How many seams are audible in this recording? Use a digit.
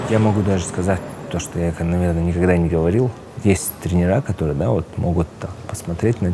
1